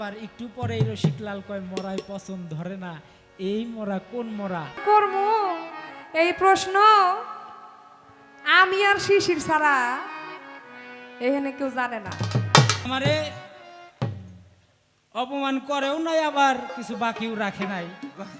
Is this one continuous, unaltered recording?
no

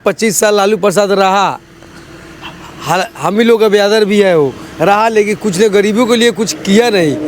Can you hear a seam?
no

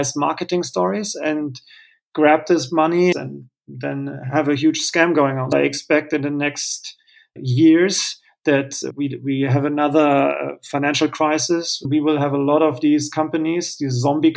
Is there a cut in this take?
yes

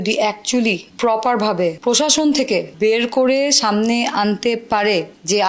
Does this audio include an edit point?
yes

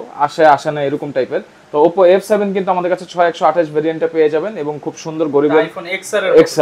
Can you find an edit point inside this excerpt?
no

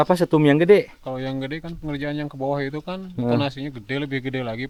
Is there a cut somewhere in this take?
no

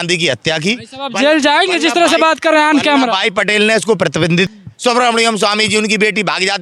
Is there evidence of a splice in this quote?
yes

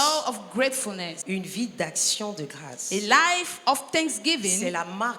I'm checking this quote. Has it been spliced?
yes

